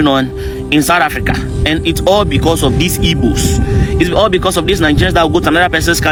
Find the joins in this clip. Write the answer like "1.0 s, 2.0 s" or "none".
none